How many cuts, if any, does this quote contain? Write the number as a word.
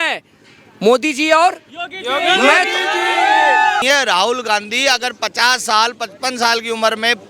one